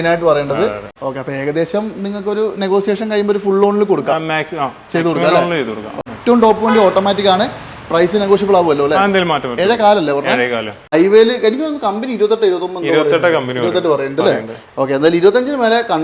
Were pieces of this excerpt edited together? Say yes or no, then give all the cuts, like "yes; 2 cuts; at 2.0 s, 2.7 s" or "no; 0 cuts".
yes; 3 cuts; at 0.9 s, 6.0 s, 10.9 s